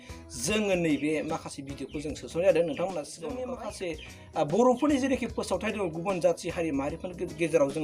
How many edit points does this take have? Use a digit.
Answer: 1